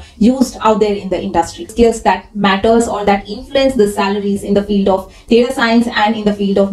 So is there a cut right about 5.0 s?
no; 1 cut; at 1.7 s

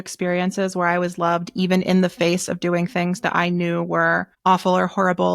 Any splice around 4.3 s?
yes; 1 cut; at 4.3 s

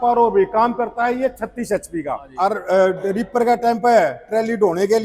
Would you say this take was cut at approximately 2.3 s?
yes; 1 cut; at 2.3 s

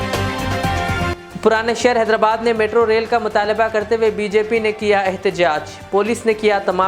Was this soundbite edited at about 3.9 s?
no; 1 cut; at 1.1 s

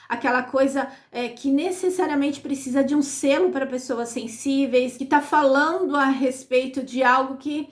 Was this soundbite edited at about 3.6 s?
no; 1 cut; at 5.0 s

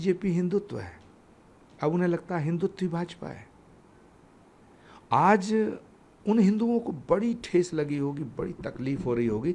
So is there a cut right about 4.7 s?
no; 0 cuts

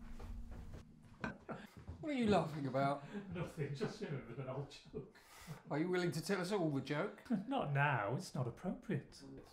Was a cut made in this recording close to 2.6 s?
no; 1 cut; at 1.4 s

